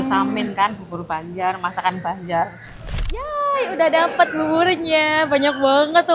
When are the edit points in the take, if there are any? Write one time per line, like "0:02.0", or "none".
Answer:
0:02.9